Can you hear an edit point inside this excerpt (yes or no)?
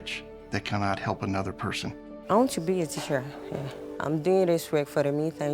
yes